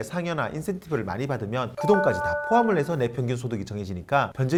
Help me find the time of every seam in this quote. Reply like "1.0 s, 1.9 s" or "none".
none